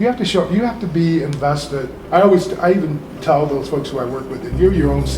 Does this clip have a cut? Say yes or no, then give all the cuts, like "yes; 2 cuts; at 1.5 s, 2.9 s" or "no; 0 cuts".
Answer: yes; 1 cut; at 2.0 s